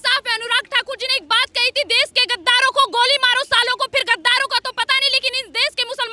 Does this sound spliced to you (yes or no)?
no